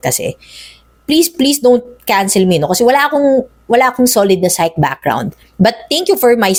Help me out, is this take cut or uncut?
uncut